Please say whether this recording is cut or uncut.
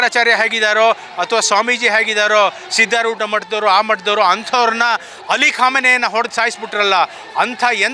uncut